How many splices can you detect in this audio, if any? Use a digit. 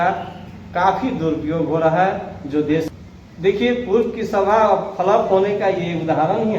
1